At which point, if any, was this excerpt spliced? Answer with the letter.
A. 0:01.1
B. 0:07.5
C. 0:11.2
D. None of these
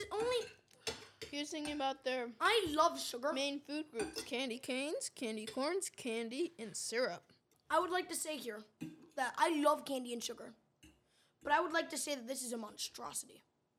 B